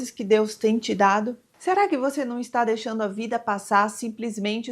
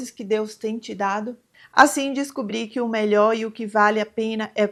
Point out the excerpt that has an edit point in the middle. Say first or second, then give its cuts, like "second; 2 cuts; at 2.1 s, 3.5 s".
first; 1 cut; at 1.5 s